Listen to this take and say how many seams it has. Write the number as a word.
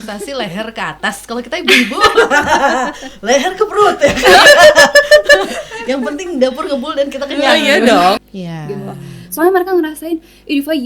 one